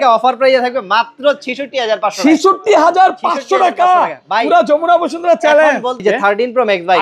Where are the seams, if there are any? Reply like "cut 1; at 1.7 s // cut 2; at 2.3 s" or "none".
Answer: cut 1; at 6.0 s